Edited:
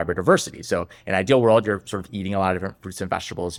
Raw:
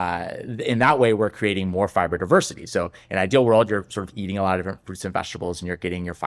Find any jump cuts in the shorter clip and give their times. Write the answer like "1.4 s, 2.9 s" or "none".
none